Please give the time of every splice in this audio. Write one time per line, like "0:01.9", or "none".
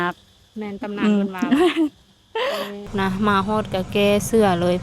0:02.9